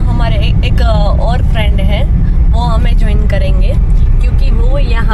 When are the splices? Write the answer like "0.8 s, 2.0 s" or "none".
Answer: none